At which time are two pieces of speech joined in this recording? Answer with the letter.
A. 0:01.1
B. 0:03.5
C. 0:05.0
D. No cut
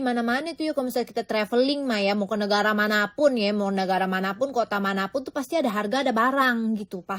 D